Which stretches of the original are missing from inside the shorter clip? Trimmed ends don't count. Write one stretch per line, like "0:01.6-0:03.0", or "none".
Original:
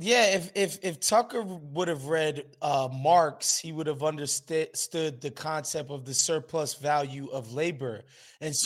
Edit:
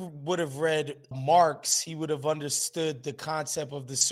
0:02.6-0:02.9
0:04.4-0:04.8